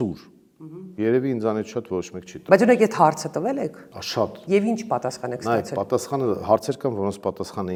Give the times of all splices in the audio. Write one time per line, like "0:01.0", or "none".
none